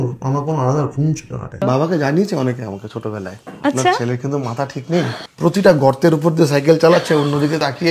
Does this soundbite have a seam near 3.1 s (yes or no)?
no